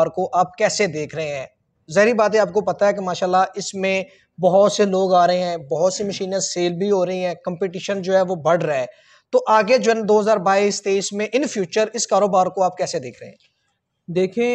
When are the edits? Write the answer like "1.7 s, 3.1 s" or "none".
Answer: none